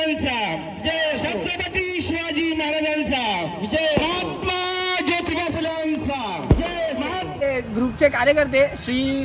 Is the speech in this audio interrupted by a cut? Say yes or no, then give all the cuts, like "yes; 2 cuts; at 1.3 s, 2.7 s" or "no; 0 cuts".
yes; 1 cut; at 7.3 s